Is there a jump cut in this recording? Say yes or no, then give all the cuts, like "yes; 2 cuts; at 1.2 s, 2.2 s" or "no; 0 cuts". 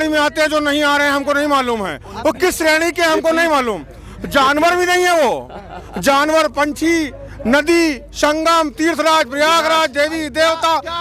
no; 0 cuts